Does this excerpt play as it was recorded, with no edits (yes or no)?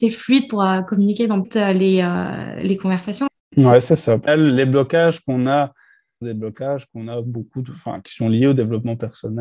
no